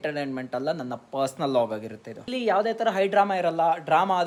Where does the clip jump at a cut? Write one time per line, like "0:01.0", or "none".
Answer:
none